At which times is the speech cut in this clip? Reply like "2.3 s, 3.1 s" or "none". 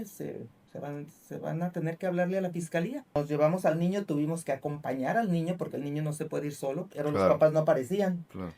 3.1 s